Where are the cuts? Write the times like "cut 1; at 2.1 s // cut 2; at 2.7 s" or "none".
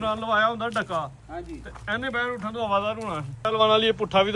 cut 1; at 3.4 s